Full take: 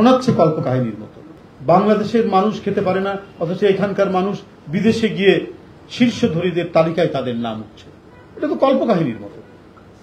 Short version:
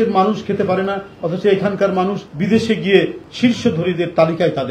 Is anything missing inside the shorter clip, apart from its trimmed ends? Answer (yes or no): yes